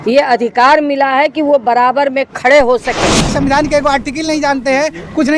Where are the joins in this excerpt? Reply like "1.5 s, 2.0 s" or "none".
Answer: 3.3 s